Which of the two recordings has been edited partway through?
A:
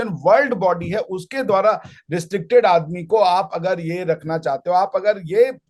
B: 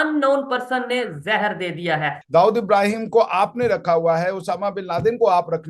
B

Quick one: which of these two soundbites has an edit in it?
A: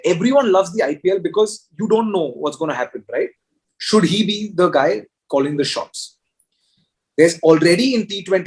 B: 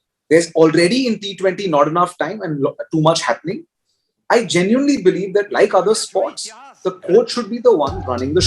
A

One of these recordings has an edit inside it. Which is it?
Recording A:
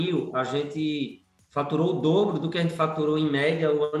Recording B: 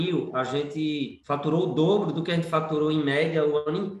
B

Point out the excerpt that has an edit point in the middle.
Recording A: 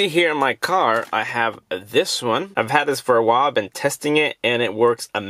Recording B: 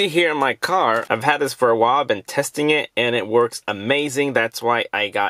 B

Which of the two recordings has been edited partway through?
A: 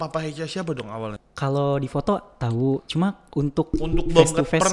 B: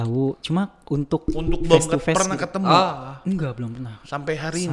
A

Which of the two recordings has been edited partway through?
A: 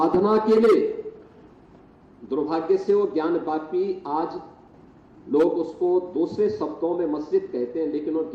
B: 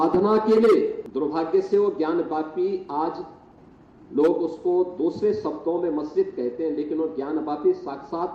B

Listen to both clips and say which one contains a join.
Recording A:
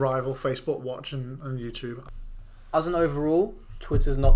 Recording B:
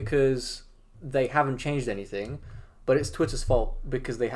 A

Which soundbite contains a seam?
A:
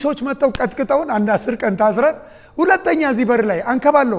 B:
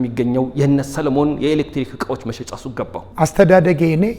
B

